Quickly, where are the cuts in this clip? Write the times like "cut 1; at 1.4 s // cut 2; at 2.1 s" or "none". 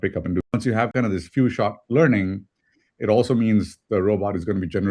cut 1; at 0.9 s